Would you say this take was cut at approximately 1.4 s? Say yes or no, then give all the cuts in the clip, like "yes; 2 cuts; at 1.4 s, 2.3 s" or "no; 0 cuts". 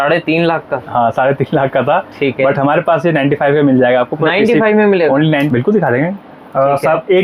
no; 1 cut; at 5.3 s